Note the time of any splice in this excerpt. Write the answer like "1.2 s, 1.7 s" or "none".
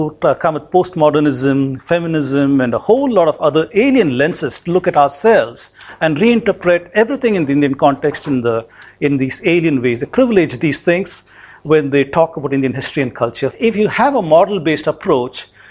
13.5 s